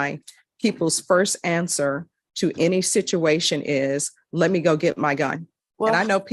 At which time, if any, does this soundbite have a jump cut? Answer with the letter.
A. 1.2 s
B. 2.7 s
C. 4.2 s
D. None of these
C